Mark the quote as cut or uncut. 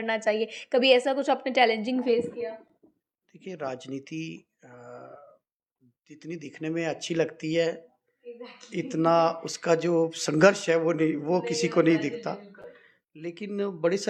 uncut